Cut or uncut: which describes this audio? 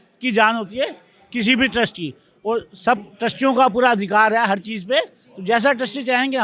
uncut